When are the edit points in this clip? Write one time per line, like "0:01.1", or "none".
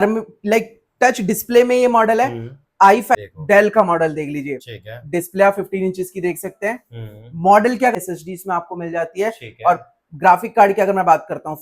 0:03.2
0:08.0